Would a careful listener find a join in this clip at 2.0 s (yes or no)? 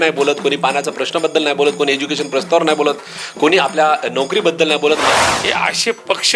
no